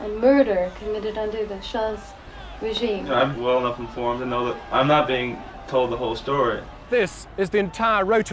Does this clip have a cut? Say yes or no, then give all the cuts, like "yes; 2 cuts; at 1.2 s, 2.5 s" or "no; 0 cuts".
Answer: yes; 3 cuts; at 3.3 s, 4.6 s, 6.9 s